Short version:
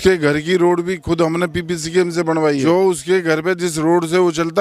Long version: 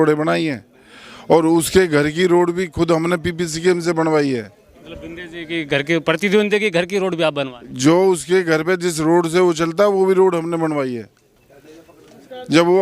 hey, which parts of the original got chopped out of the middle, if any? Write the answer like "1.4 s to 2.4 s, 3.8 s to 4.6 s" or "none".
4.3 s to 7.9 s